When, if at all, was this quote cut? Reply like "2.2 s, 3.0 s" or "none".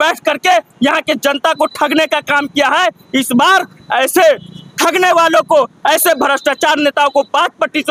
none